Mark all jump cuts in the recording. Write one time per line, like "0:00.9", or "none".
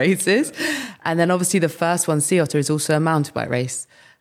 0:00.9